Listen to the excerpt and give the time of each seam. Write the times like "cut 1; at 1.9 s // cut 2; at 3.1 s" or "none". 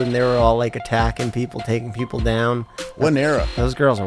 cut 1; at 2.8 s